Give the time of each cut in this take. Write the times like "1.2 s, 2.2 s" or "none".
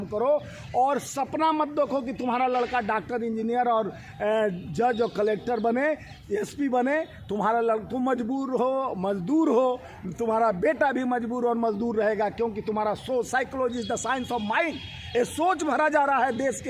none